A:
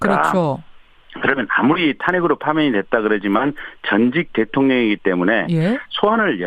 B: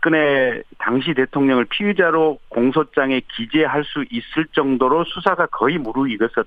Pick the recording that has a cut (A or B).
A